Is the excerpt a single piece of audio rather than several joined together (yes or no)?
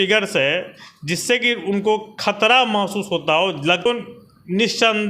no